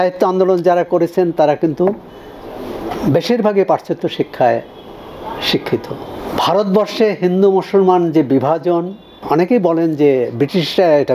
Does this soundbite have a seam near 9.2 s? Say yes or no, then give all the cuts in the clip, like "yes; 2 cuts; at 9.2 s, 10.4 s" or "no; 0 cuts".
yes; 2 cuts; at 6.2 s, 9.2 s